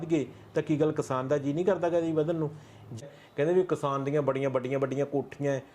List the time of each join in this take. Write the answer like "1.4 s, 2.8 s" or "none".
3.0 s